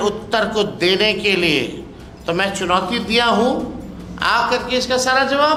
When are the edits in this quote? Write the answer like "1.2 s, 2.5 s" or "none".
none